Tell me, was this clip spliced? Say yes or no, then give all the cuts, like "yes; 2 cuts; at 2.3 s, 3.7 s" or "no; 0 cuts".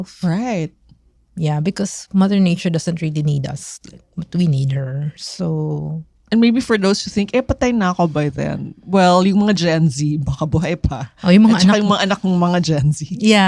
no; 0 cuts